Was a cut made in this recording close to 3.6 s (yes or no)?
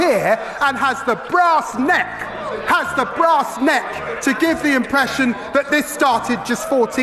no